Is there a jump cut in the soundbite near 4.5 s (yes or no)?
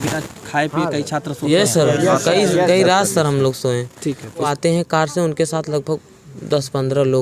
yes